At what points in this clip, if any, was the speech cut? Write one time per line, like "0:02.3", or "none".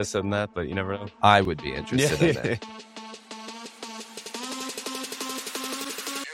0:02.7